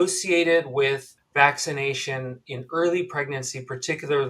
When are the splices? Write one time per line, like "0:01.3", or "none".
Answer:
0:01.2